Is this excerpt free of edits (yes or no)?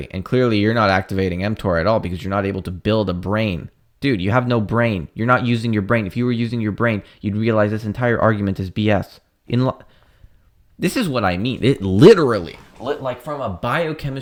yes